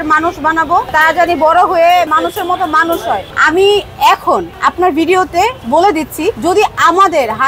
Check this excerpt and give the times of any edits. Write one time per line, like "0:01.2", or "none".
0:02.1
0:03.3
0:06.4